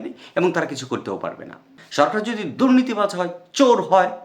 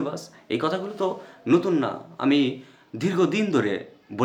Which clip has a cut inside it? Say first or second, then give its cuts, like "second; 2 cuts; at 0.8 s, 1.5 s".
first; 1 cut; at 1.8 s